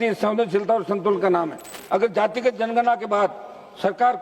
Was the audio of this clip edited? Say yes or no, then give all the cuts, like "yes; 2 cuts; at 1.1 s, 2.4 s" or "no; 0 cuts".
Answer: yes; 1 cut; at 1.7 s